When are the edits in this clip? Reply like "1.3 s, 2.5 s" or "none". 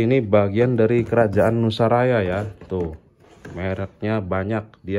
none